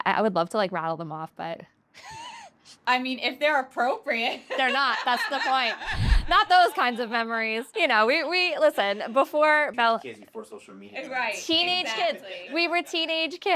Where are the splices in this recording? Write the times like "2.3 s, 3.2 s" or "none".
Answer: 7.6 s, 9.7 s

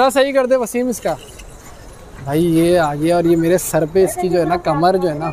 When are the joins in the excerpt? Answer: none

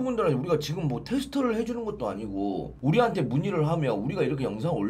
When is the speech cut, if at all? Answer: 2.7 s

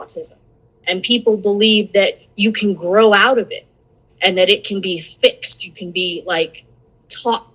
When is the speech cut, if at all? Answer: none

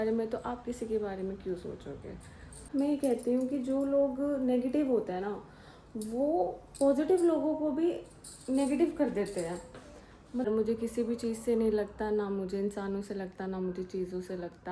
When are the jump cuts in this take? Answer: 2.6 s, 10.5 s

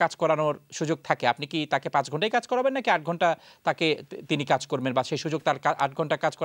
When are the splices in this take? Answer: none

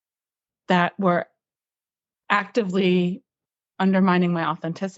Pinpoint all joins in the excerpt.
none

